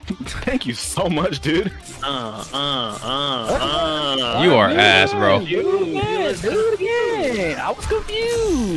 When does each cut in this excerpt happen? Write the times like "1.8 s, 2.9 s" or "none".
1.8 s